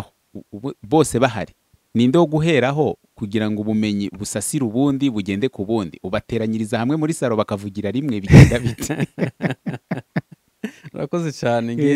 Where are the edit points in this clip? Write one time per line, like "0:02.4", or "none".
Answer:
none